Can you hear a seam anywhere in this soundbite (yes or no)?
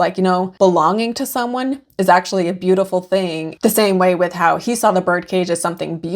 yes